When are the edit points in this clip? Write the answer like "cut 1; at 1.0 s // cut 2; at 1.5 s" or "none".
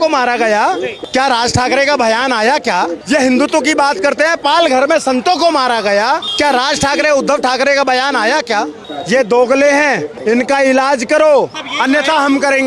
cut 1; at 1.0 s // cut 2; at 6.3 s // cut 3; at 10.1 s // cut 4; at 11.6 s